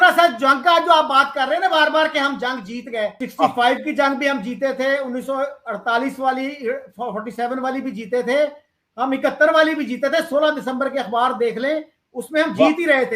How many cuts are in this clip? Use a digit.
1